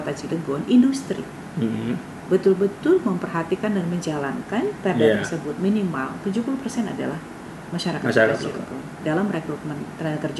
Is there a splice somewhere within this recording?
no; 0 cuts

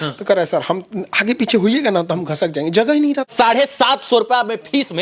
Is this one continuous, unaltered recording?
no; 1 cut; at 3.3 s

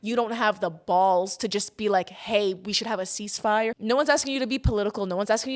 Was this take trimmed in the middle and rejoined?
yes; 1 cut; at 3.8 s

